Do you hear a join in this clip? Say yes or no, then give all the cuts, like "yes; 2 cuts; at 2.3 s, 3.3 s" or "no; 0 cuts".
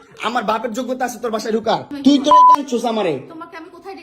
yes; 1 cut; at 1.9 s